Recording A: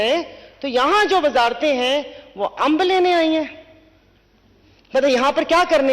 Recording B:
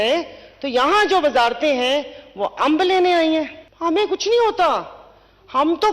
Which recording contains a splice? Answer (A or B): B